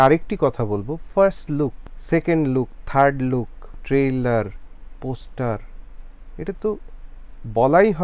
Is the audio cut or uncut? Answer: cut